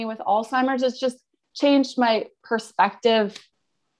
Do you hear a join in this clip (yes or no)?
no